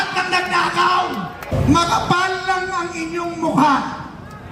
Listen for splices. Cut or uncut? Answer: cut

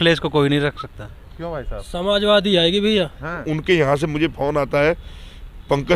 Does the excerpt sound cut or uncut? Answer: cut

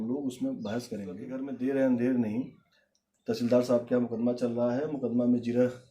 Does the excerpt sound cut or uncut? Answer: cut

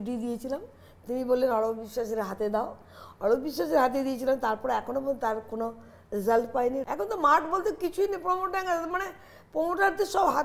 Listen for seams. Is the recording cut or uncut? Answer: cut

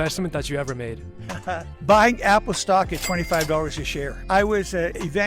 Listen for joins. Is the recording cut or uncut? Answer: uncut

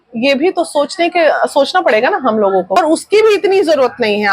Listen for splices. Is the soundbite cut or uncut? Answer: cut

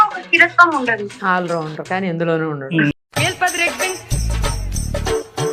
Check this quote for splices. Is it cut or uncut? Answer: cut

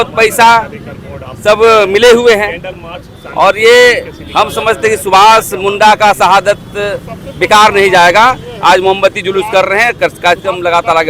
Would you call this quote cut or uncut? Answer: uncut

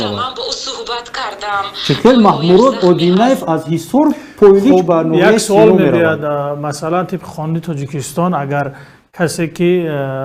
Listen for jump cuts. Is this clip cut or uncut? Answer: uncut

